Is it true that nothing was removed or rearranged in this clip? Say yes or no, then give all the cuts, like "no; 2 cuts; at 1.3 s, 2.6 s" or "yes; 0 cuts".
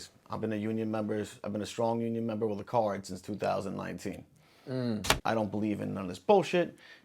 no; 1 cut; at 5.1 s